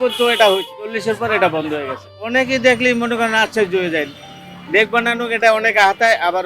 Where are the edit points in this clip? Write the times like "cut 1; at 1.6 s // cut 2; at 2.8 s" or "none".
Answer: cut 1; at 1.0 s // cut 2; at 2.2 s